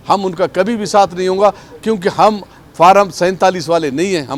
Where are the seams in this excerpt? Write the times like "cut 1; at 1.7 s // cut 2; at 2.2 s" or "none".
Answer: none